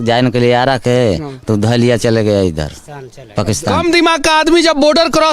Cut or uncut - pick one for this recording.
cut